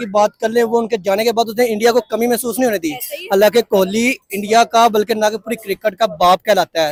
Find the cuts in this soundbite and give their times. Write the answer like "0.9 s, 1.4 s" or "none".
none